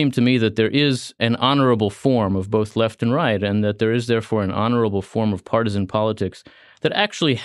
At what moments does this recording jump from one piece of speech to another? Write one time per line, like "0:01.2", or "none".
0:01.1